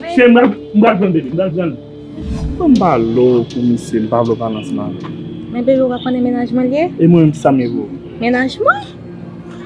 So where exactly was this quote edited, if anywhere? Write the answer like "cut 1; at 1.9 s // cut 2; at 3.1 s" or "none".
cut 1; at 2.5 s